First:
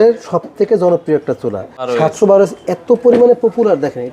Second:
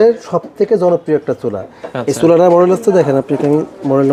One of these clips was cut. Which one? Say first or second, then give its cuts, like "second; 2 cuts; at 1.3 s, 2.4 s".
first; 1 cut; at 1.7 s